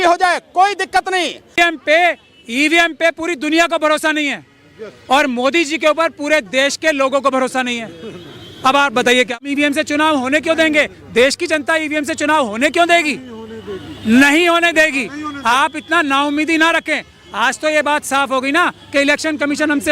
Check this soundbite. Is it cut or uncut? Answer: cut